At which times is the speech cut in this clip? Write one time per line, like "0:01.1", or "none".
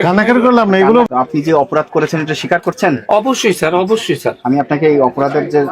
0:01.1